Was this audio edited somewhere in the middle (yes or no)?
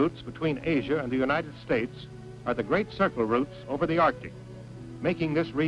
yes